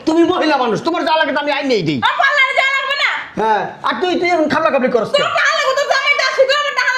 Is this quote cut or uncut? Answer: uncut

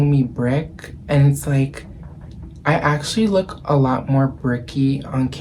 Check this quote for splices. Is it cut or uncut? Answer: uncut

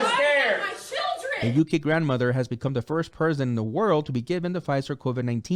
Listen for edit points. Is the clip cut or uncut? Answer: cut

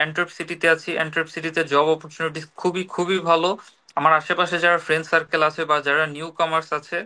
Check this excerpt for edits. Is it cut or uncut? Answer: uncut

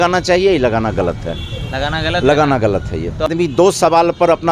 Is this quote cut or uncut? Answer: cut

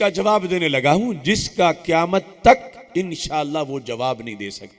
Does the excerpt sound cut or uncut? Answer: uncut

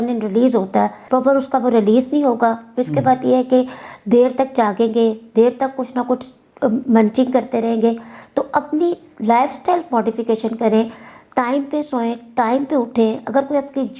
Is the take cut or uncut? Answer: uncut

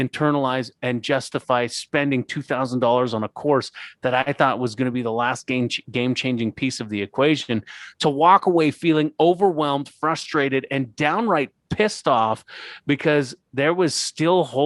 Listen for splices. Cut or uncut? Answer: uncut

